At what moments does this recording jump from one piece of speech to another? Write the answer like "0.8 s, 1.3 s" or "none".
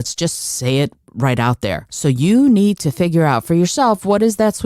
1.9 s